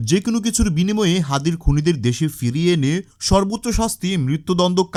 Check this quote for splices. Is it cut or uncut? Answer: uncut